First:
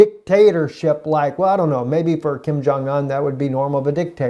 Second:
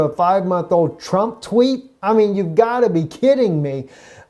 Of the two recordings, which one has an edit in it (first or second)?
second